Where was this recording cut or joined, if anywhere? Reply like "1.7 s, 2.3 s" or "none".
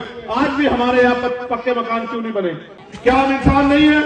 2.7 s